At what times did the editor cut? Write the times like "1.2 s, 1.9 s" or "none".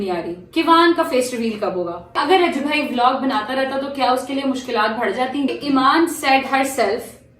2.2 s, 5.5 s